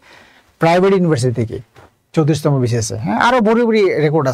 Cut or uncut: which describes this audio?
uncut